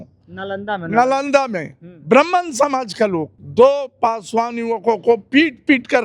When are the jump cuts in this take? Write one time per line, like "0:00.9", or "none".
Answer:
0:03.4